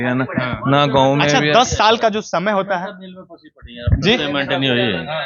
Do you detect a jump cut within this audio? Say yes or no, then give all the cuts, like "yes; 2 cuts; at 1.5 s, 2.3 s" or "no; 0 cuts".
no; 0 cuts